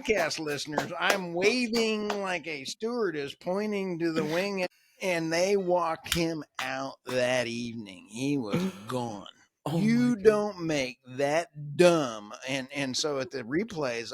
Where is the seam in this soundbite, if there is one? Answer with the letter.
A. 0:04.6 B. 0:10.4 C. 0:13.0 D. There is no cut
A